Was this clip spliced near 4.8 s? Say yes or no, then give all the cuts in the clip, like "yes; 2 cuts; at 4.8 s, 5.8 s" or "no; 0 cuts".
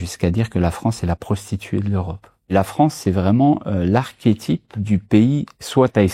yes; 2 cuts; at 2.5 s, 4.8 s